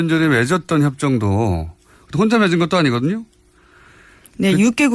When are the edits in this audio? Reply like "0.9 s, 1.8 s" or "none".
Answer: none